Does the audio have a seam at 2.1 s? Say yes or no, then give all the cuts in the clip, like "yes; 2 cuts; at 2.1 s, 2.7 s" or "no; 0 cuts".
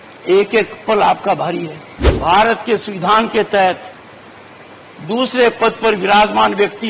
yes; 1 cut; at 2.1 s